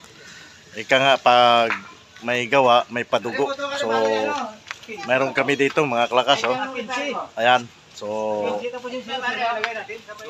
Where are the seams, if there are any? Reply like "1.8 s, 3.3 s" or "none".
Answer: none